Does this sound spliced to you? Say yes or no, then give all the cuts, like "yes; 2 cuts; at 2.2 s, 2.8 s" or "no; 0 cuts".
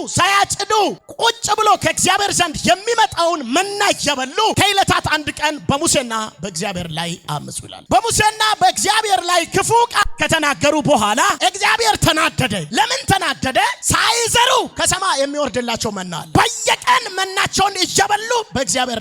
no; 0 cuts